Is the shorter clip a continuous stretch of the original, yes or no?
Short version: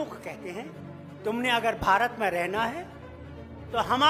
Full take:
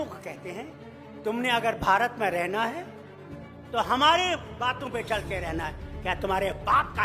yes